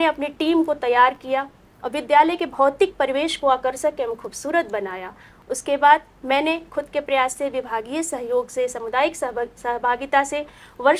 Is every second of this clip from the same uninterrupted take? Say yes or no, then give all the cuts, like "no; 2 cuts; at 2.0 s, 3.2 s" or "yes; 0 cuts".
yes; 0 cuts